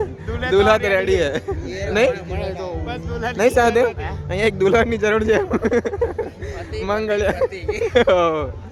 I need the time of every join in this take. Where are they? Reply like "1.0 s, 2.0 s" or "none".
none